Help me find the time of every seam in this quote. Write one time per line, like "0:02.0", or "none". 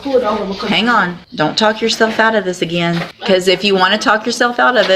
0:01.2
0:03.1